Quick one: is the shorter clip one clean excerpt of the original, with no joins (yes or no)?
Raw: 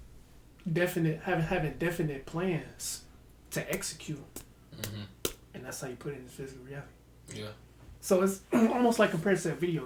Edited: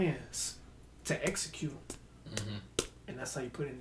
yes